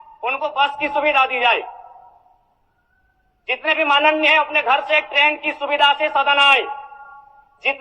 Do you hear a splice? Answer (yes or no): no